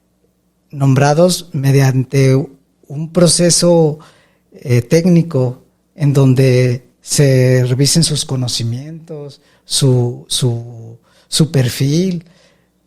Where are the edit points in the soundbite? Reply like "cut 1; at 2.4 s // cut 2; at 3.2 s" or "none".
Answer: none

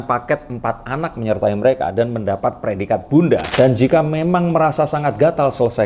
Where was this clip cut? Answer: cut 1; at 3.5 s

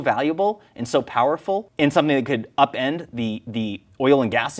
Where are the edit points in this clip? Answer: cut 1; at 1.7 s

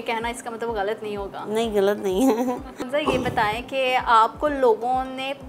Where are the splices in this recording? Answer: cut 1; at 2.8 s

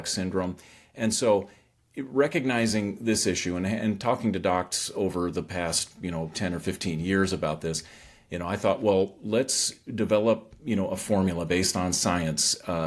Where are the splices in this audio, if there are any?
none

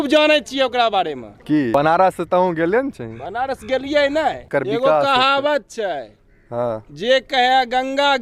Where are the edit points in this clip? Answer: cut 1; at 1.7 s // cut 2; at 4.4 s

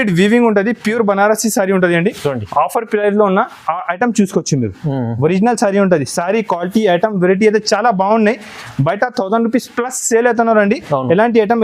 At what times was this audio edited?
none

